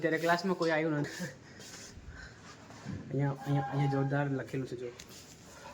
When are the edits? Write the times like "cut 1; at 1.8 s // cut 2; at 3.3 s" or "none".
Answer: cut 1; at 1.1 s